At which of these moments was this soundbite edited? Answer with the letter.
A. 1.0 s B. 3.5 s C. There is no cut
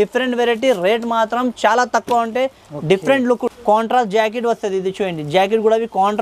B